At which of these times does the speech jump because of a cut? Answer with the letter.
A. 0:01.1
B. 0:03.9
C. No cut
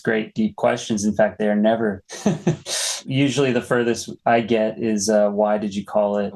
C